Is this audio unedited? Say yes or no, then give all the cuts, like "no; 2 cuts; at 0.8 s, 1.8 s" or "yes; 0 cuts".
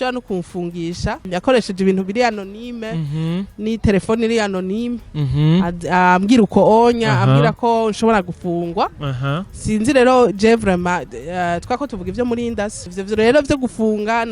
no; 2 cuts; at 1.2 s, 12.9 s